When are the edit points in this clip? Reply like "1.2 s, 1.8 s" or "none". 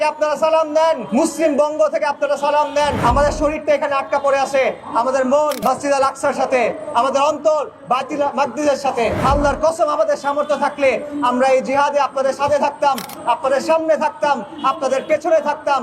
1.0 s, 3.0 s, 5.6 s, 9.2 s